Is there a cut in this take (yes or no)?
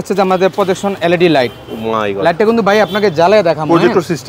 no